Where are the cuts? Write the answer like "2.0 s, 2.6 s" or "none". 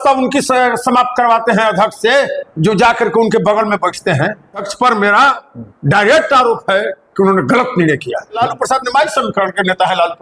4.7 s, 8.4 s